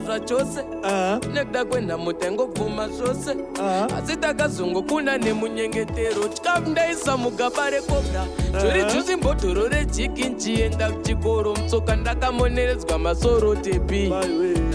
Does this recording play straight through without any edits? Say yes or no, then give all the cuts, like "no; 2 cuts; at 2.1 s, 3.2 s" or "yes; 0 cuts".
yes; 0 cuts